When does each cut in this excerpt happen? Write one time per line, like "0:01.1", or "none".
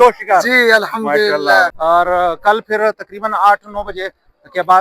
0:01.7